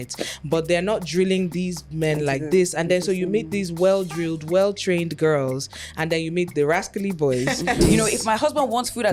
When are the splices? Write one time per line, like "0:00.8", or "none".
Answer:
0:07.8